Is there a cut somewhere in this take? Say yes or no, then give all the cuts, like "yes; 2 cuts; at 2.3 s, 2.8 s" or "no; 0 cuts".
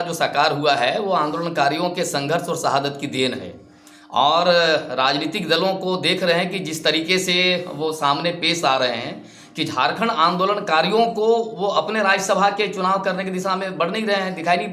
no; 0 cuts